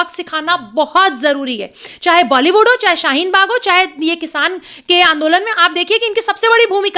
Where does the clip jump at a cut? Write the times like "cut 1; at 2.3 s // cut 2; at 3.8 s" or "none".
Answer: none